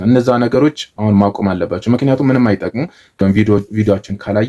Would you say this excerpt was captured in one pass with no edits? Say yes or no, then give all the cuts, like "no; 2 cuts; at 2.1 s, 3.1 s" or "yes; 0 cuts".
no; 1 cut; at 3.2 s